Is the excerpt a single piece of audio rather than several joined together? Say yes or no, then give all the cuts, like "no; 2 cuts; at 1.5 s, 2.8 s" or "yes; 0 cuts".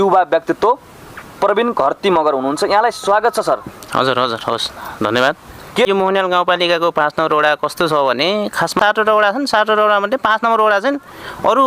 no; 2 cuts; at 5.8 s, 8.7 s